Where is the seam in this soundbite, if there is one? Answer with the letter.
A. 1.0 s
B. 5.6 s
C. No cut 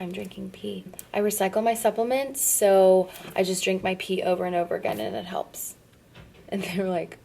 A